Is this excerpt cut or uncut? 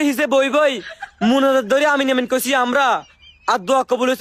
uncut